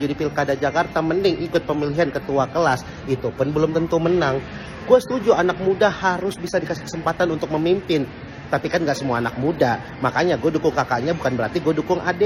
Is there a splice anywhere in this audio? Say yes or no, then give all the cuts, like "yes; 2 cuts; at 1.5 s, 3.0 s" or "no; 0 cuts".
no; 0 cuts